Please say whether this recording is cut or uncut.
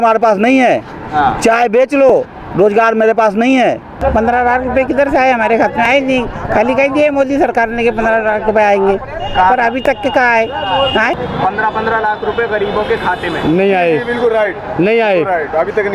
cut